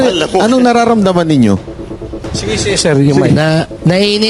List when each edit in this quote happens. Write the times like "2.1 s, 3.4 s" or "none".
none

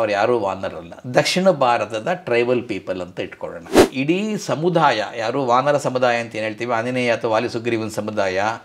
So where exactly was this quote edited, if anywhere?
3.8 s

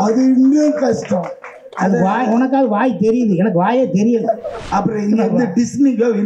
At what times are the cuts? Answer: 4.6 s

